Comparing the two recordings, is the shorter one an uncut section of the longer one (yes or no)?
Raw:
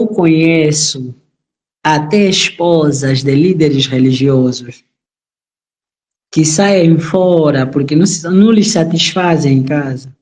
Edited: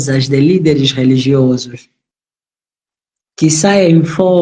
yes